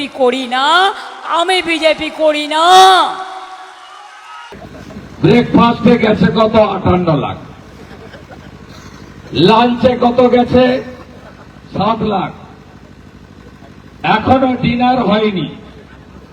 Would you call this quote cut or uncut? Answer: cut